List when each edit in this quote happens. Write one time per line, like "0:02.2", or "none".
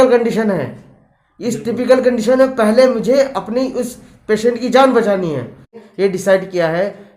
0:05.8